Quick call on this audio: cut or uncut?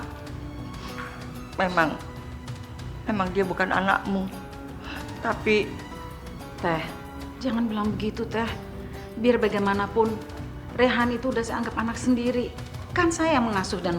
uncut